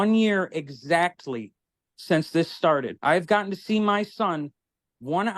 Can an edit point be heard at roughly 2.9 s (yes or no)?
yes